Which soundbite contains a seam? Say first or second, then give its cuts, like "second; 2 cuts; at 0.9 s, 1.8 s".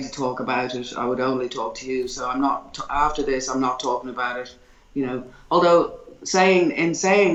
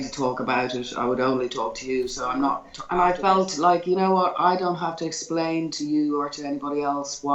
second; 1 cut; at 2.7 s